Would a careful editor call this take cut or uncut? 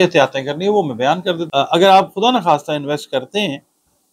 cut